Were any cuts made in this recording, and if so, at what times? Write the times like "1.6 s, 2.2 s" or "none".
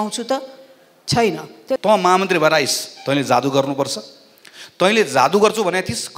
1.8 s